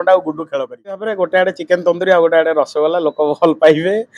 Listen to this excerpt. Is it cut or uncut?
cut